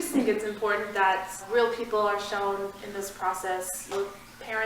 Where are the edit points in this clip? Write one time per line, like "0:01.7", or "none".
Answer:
0:01.5
0:03.9